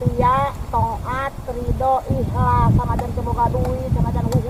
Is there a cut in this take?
no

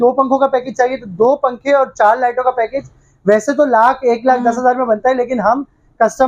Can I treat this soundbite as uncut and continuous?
yes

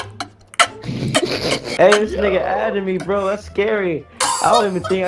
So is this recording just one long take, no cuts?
no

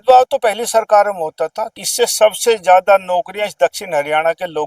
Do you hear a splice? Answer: yes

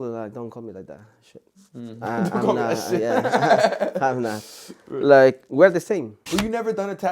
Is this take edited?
yes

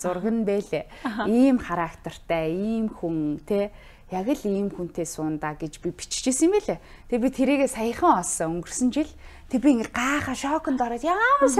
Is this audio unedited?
yes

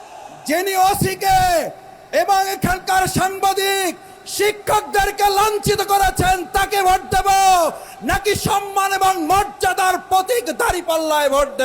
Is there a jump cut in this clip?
no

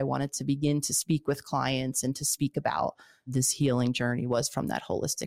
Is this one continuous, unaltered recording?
no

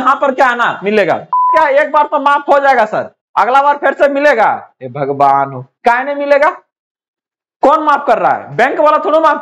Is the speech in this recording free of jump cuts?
no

